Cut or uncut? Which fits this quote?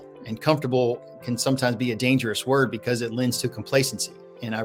uncut